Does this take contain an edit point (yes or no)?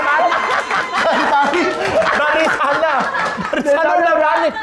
no